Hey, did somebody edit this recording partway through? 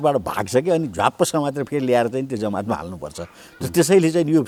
no; 0 cuts

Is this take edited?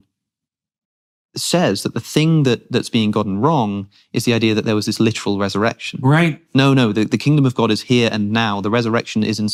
no; 0 cuts

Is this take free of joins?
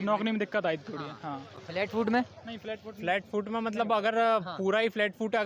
yes; 0 cuts

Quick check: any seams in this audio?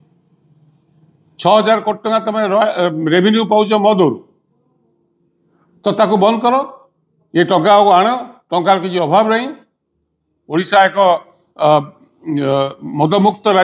no; 0 cuts

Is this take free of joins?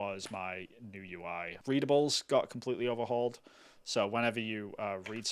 no; 1 cut; at 1.5 s

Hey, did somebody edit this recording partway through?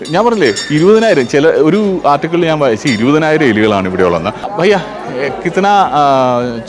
yes; 1 cut; at 4.4 s

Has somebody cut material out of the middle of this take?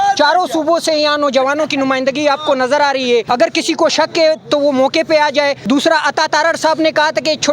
yes; 2 cuts; at 3.3 s, 5.6 s

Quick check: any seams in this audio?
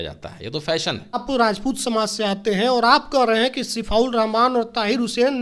yes; 1 cut; at 1.2 s

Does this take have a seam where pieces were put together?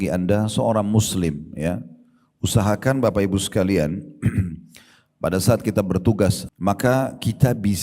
yes; 1 cut; at 6.5 s

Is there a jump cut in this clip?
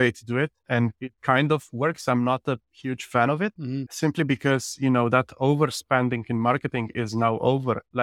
no; 0 cuts

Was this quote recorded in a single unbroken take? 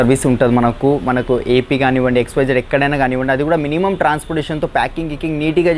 yes; 0 cuts

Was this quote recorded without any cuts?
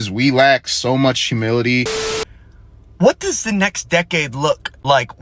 no; 1 cut; at 2.0 s

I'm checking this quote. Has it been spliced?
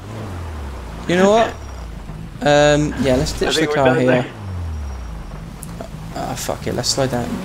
no; 0 cuts

